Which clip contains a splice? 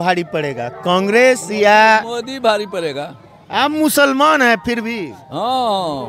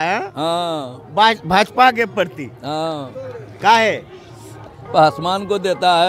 second; 1 cut; at 4.7 s

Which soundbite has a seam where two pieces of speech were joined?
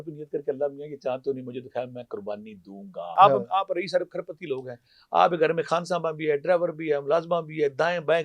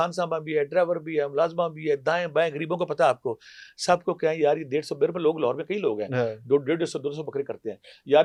first; 1 cut; at 3.1 s

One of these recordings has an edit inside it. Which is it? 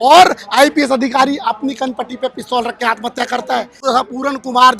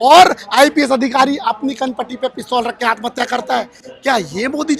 first; 1 cut; at 3.8 s

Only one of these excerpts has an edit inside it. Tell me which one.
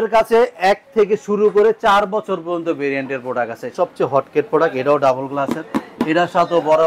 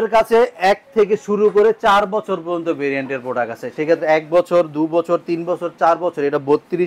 first; 1 cut; at 3.7 s

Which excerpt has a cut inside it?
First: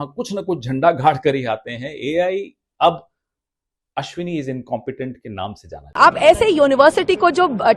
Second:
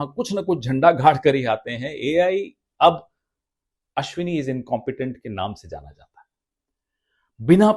first; 1 cut; at 5.8 s

